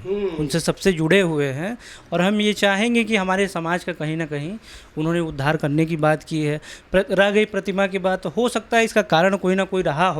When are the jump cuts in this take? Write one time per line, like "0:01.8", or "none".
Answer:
none